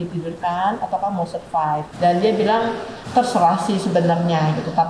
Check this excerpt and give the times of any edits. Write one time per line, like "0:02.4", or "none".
0:01.9
0:02.9